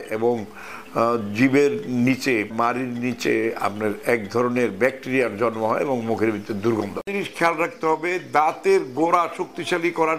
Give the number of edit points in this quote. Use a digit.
1